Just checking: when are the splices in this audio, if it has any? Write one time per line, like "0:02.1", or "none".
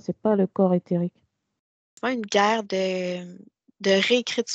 0:02.0